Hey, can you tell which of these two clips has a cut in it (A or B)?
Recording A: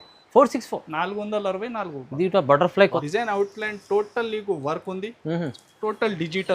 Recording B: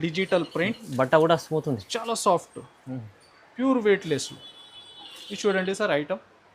A